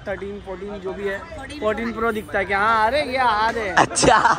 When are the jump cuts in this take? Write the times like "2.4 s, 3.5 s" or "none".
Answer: none